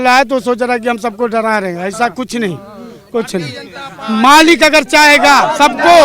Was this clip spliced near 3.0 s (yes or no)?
no